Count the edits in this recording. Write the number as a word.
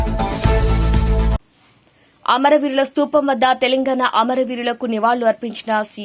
one